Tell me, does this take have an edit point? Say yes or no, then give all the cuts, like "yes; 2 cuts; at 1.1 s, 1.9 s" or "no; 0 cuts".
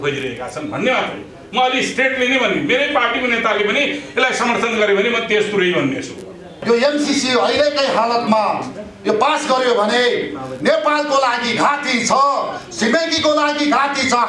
yes; 1 cut; at 6.6 s